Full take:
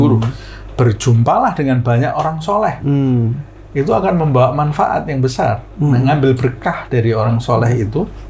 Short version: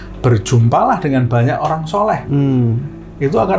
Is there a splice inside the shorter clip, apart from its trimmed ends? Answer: no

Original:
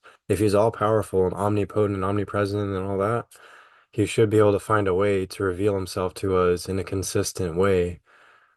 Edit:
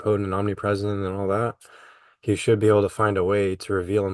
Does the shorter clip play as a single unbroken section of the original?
yes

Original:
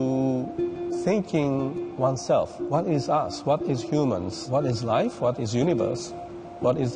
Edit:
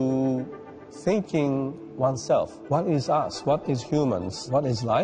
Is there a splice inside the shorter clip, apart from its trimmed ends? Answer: no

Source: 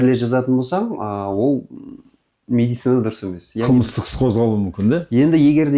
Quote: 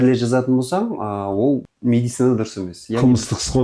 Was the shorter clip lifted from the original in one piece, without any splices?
no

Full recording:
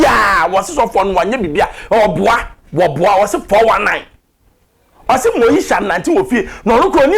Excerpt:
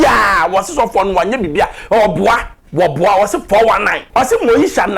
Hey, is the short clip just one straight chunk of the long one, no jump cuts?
no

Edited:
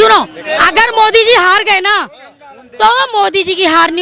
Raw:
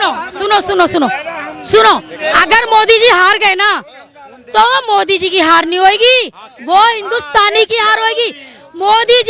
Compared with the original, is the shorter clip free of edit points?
yes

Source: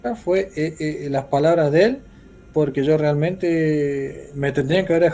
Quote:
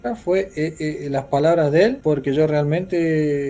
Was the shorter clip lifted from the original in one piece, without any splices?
no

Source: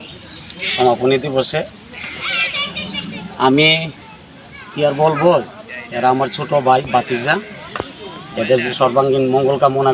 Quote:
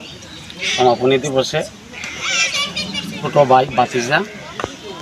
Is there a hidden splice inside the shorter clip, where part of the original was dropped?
yes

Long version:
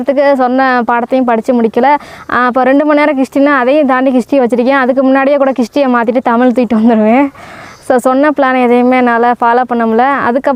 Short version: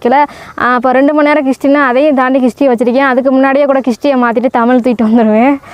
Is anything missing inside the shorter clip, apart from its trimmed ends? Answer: no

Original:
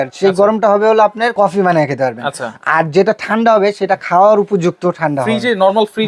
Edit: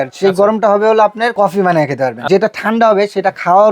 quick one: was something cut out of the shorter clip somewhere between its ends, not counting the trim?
yes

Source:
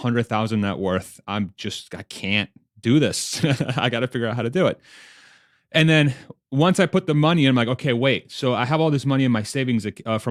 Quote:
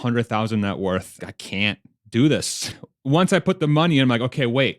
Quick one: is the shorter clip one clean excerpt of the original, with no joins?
no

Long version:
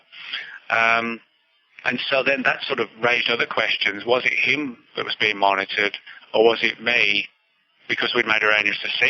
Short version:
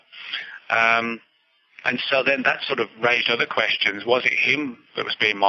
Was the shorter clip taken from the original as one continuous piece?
yes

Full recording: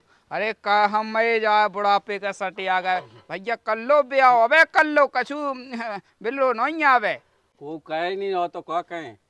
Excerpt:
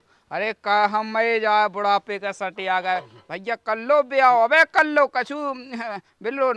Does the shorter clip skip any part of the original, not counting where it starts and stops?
no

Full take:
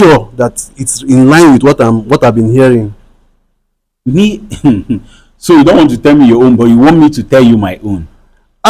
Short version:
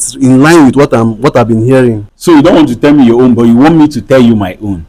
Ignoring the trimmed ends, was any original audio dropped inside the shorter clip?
yes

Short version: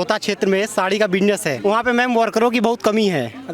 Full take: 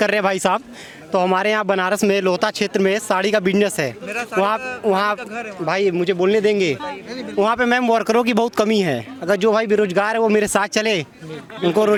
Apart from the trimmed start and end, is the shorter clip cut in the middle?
yes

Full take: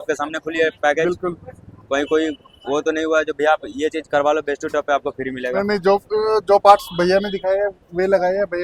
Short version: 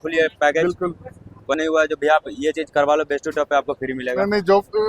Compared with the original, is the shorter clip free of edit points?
no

